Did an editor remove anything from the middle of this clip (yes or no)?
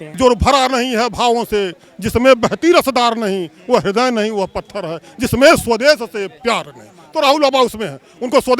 no